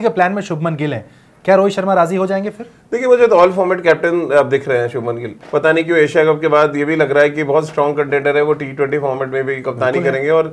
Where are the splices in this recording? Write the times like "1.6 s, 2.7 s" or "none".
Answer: 5.3 s